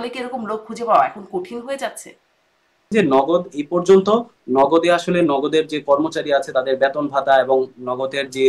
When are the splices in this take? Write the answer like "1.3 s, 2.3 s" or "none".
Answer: 2.9 s